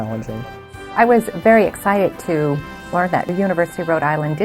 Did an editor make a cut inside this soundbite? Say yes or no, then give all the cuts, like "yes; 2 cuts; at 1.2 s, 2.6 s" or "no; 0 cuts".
yes; 2 cuts; at 0.9 s, 3.3 s